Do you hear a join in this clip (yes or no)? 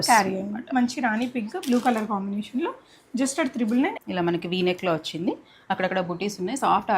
yes